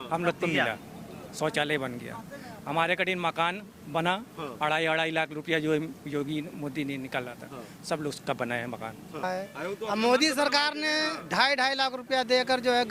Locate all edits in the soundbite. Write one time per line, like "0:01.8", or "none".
0:09.2